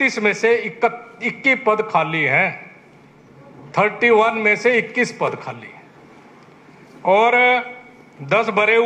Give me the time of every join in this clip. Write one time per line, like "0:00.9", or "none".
none